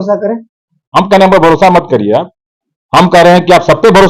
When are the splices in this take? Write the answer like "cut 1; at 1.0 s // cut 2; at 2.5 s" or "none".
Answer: none